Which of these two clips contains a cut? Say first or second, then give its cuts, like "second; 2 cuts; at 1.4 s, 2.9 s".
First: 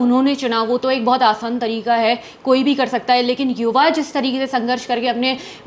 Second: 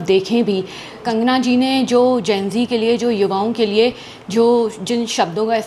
second; 1 cut; at 0.9 s